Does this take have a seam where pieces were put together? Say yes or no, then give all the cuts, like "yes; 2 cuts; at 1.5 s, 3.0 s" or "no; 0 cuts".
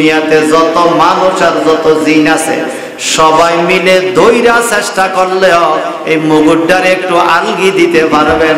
no; 0 cuts